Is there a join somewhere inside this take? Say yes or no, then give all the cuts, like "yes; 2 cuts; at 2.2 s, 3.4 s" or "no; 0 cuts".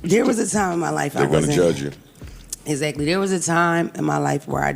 no; 0 cuts